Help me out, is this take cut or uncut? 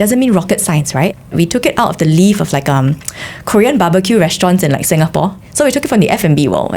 cut